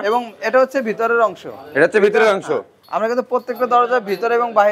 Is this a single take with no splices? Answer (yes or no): yes